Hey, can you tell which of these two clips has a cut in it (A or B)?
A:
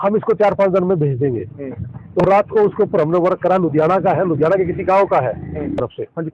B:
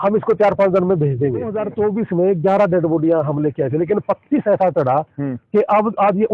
B